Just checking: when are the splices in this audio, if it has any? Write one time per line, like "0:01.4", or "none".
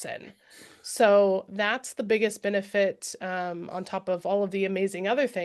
none